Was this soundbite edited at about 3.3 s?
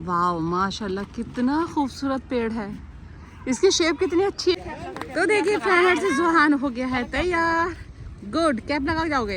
no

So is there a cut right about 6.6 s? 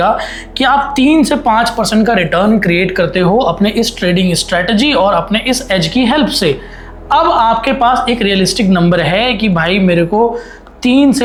no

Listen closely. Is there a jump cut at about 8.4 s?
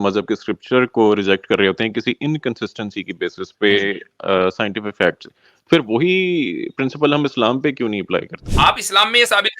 yes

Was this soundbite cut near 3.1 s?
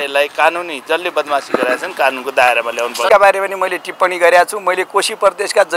yes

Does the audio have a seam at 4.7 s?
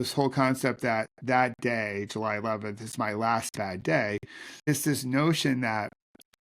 yes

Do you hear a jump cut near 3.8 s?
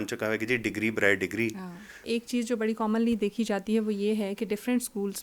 no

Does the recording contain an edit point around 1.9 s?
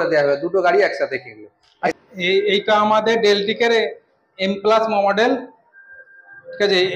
yes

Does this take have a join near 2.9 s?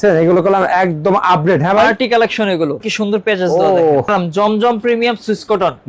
yes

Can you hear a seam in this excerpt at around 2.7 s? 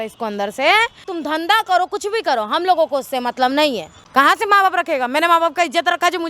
no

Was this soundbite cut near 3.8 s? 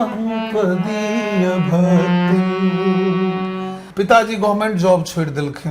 yes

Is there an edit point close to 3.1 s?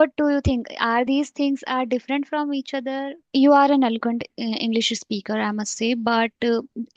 yes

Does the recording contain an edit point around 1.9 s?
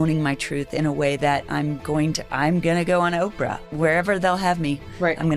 no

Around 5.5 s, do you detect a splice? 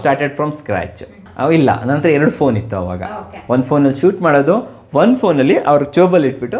no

